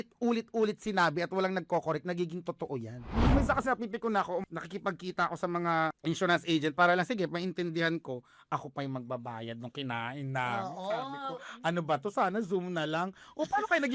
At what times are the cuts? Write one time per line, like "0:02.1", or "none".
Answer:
0:03.3
0:04.5
0:06.0